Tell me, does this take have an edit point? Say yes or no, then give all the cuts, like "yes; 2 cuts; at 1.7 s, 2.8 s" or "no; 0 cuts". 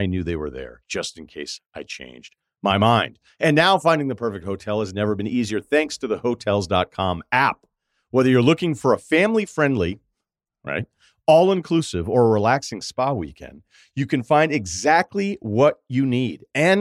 no; 0 cuts